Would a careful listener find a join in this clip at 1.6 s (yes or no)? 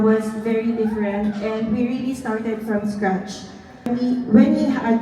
no